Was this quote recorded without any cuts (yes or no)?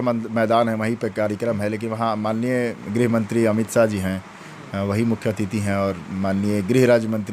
yes